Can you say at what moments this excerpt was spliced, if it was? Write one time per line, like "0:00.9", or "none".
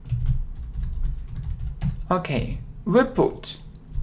0:01.5